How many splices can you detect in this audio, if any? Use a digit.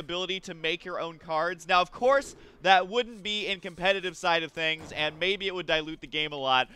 1